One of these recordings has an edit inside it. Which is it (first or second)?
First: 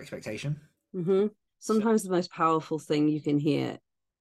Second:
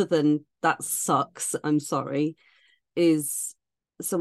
first